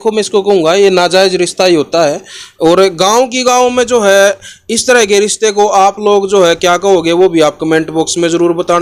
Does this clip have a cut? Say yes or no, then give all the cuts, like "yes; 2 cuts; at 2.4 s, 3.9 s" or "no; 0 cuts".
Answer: no; 0 cuts